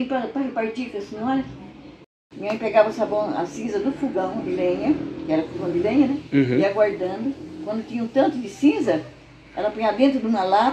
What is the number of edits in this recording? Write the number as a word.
one